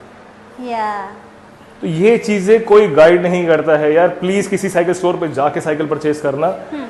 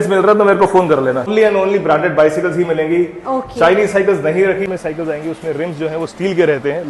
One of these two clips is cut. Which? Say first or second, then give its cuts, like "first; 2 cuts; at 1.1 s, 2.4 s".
second; 2 cuts; at 1.3 s, 4.7 s